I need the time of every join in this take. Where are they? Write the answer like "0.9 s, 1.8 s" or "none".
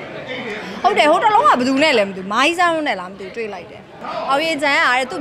4.0 s